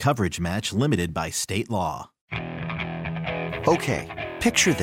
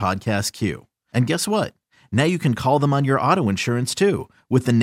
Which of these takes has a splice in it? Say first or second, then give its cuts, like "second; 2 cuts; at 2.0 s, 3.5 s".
first; 1 cut; at 2.2 s